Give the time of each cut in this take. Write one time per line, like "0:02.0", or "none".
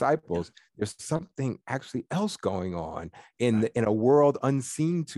none